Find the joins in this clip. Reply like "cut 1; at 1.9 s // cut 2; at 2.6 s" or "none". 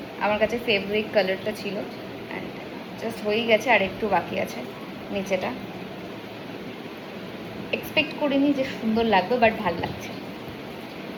none